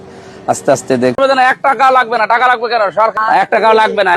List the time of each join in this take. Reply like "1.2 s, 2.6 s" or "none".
1.1 s